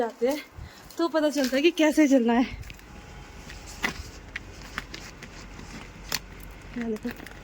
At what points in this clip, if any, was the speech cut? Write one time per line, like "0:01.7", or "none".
0:02.8